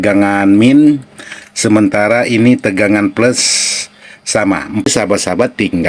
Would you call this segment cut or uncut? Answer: cut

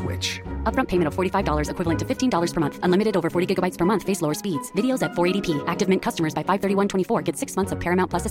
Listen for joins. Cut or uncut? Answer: uncut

